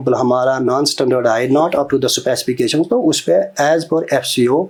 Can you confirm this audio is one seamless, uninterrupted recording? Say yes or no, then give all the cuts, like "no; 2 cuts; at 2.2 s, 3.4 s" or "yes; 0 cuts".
yes; 0 cuts